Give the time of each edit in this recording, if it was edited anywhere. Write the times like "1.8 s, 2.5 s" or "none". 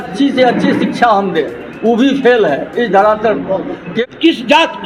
3.9 s